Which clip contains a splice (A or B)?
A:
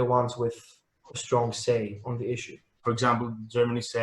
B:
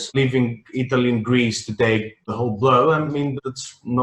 A